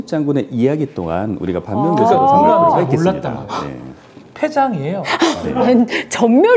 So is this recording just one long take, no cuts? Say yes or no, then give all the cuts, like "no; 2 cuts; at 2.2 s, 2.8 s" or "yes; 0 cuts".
yes; 0 cuts